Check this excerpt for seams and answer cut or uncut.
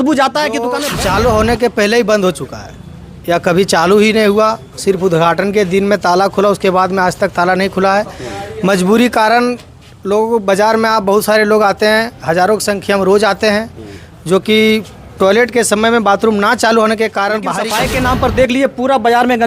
cut